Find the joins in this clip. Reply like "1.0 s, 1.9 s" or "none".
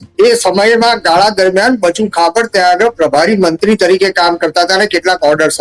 none

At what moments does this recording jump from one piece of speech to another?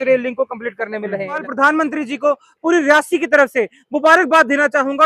1.5 s

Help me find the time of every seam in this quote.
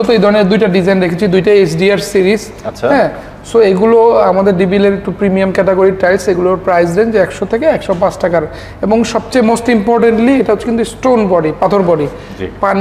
none

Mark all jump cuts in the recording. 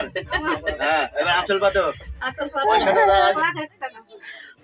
3.4 s

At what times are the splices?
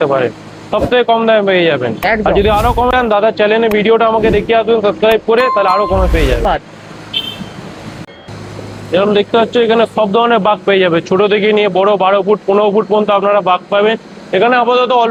none

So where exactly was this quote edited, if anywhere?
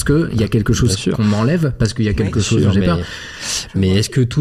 none

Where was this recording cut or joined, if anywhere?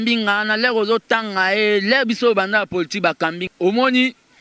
3.4 s

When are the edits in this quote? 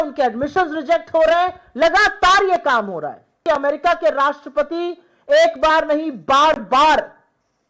3.4 s

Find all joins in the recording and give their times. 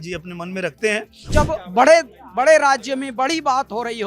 1.3 s

